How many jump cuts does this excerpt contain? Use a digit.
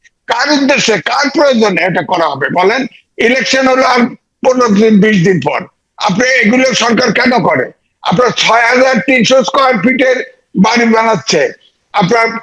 0